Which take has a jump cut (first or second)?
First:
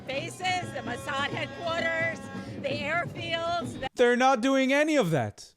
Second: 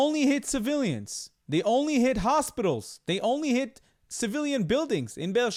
first